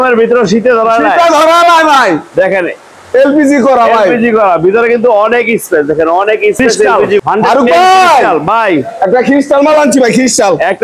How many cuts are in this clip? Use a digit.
1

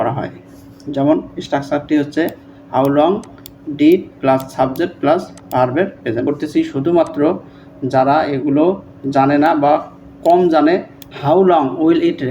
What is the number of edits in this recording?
2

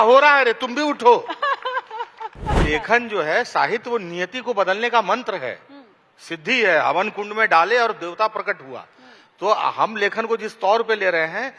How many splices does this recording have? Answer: 1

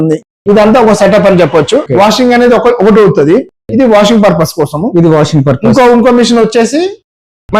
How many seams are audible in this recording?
1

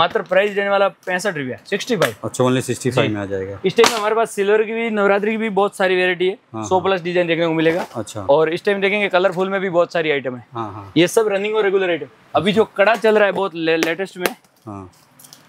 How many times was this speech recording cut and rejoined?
0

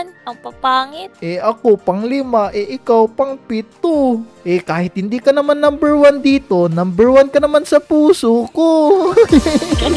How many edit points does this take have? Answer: 0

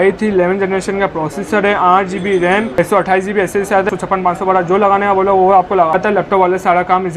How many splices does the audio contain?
3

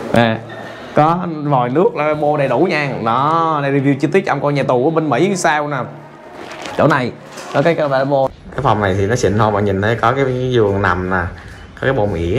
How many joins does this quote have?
1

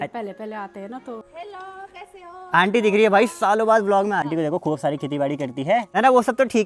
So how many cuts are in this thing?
3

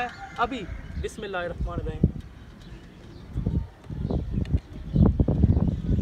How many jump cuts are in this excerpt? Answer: 0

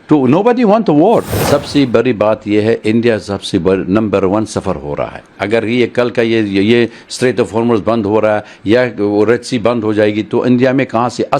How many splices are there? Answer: 1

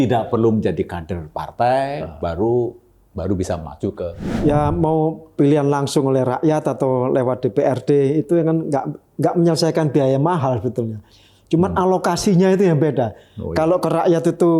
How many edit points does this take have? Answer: 1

